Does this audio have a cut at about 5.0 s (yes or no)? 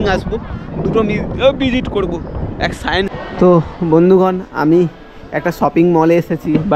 no